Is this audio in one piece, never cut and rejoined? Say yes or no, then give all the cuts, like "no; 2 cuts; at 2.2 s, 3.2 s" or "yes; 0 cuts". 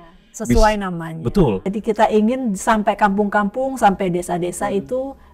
no; 1 cut; at 1.7 s